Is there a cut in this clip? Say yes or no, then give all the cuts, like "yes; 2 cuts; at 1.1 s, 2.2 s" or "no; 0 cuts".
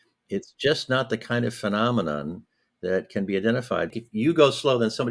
yes; 1 cut; at 3.9 s